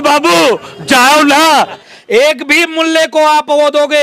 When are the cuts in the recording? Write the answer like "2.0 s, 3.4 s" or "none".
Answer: 1.8 s

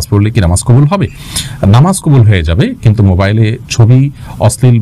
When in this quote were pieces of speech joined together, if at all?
none

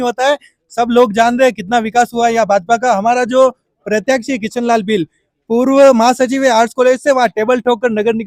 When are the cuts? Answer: none

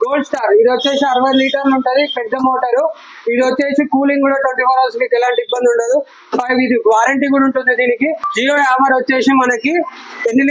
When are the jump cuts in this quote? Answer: 8.3 s

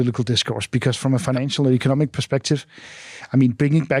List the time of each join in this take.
none

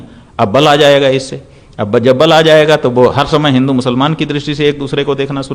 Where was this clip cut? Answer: none

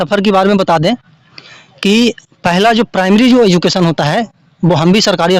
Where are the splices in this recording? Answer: none

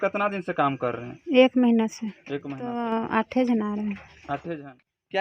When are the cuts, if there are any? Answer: 2.8 s, 4.4 s

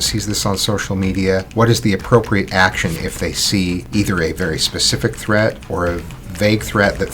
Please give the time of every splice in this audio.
1.5 s, 3.9 s

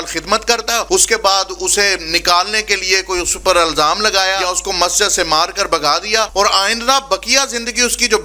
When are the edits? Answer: 0.8 s, 4.4 s, 6.3 s

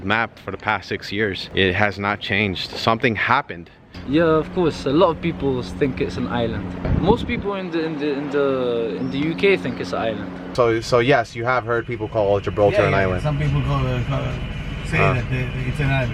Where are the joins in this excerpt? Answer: 1.4 s, 4.0 s, 6.9 s, 10.5 s

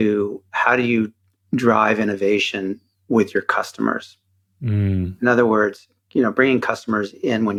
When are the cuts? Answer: none

